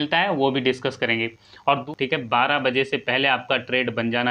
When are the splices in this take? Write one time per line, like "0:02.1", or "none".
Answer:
0:01.8